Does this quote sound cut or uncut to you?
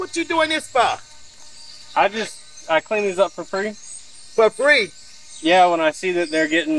uncut